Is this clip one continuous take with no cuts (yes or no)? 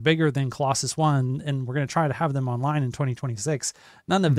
yes